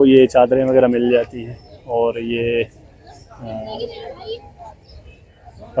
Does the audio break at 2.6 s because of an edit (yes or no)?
no